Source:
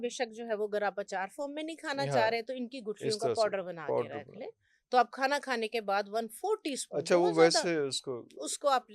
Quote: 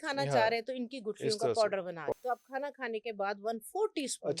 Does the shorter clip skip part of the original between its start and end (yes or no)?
yes